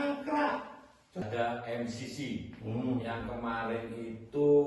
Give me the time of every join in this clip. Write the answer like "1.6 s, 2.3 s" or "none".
1.2 s